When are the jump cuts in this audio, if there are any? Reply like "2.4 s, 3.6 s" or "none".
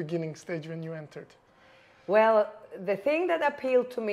none